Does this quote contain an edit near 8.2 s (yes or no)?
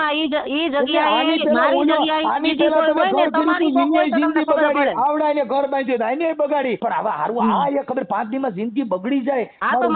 no